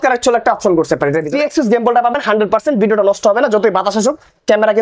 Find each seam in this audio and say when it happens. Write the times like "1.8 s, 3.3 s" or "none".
1.3 s